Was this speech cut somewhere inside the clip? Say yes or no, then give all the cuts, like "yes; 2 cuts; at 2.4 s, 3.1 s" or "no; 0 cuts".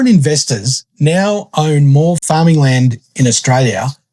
yes; 1 cut; at 2.2 s